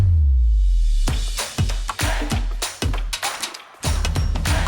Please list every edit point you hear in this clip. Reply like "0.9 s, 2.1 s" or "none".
3.4 s